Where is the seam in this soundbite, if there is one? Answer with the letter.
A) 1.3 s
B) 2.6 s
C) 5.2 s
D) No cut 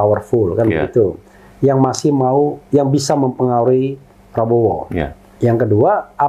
C